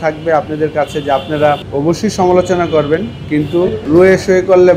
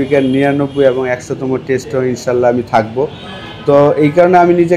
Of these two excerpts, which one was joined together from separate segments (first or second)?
first